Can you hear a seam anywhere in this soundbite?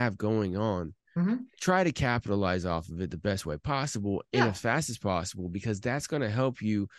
no; 0 cuts

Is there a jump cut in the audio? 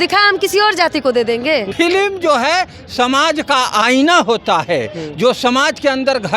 yes; 1 cut; at 1.7 s

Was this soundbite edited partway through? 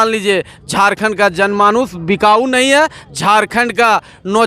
no; 0 cuts

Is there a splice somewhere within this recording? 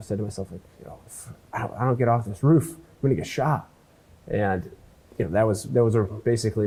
no; 0 cuts

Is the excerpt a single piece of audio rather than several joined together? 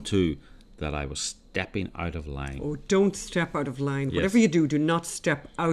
yes; 0 cuts

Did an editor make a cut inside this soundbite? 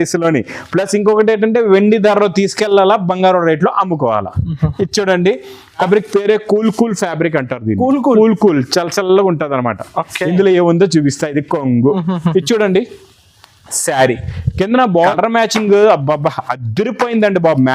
yes; 2 cuts; at 5.8 s, 15.1 s

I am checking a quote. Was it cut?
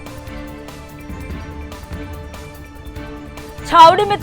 yes; 1 cut; at 1.2 s

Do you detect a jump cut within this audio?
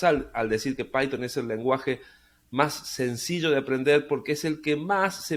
no; 0 cuts

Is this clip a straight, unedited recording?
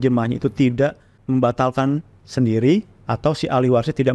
no; 1 cut; at 1.1 s

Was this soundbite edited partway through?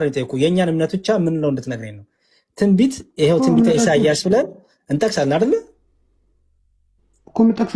no; 0 cuts

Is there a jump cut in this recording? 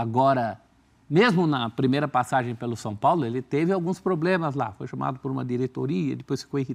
no; 0 cuts

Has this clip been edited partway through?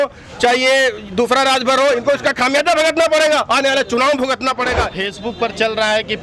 yes; 1 cut; at 4.9 s

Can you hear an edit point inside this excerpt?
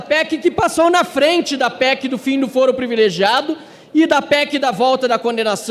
no; 0 cuts

